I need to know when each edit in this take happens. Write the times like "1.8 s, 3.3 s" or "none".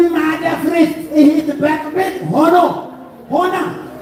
none